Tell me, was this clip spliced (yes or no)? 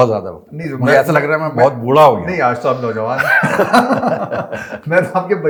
no